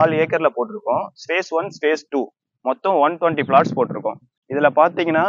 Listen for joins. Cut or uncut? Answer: uncut